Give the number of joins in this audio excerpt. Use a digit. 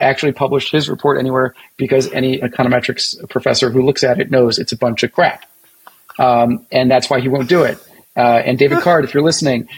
1